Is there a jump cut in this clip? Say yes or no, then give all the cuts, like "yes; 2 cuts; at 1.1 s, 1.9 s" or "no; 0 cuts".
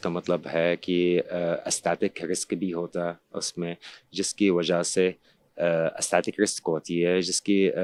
no; 0 cuts